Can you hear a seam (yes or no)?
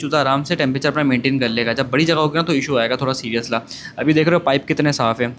no